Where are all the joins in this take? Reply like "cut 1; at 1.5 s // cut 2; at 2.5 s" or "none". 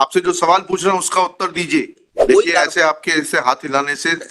cut 1; at 2.0 s